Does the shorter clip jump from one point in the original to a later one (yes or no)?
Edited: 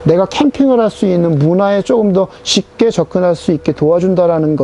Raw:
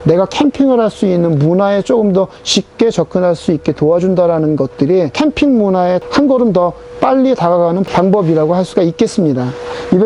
no